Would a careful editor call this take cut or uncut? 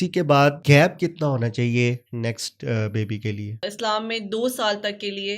cut